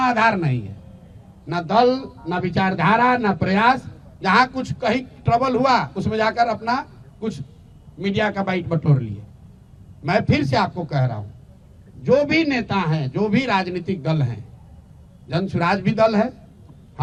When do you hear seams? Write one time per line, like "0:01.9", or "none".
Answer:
none